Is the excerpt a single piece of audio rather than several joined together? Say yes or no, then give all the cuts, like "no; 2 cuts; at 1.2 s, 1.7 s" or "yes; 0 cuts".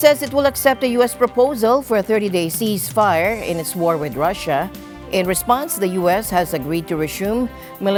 yes; 0 cuts